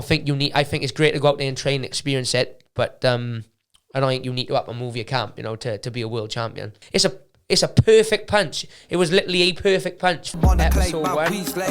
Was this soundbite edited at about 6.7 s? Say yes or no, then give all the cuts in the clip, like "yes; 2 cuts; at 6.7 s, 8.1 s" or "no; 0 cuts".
yes; 2 cuts; at 6.7 s, 10.3 s